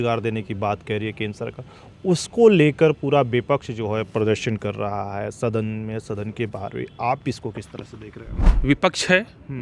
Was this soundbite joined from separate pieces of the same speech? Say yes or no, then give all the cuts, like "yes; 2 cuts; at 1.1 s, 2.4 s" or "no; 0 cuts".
yes; 1 cut; at 8.5 s